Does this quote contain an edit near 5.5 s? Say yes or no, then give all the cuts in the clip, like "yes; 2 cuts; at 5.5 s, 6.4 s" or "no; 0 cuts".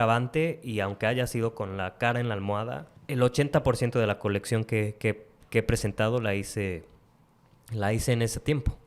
no; 1 cut; at 2.9 s